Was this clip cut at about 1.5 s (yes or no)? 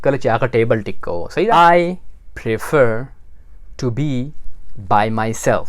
yes